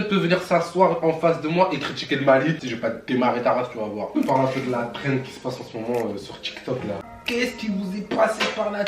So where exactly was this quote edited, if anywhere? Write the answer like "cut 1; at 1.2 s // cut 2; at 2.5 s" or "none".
cut 1; at 2.7 s // cut 2; at 4.2 s // cut 3; at 7.0 s